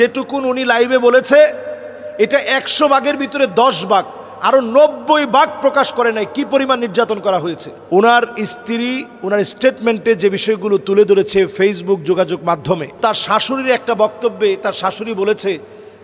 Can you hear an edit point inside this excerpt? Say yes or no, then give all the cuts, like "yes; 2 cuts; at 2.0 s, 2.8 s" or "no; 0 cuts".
yes; 2 cuts; at 7.8 s, 13.0 s